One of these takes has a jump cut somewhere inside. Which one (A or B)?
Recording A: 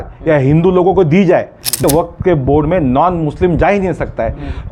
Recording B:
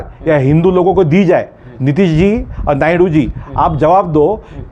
A